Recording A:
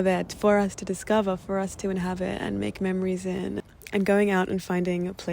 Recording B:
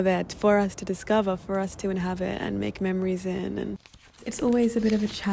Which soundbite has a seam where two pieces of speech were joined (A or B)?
B